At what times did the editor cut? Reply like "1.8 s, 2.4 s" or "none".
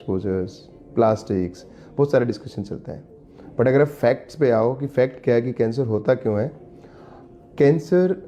none